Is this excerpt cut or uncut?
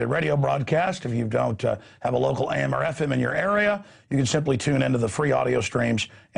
cut